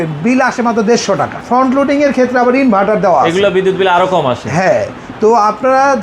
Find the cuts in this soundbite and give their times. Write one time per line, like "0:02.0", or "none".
0:01.4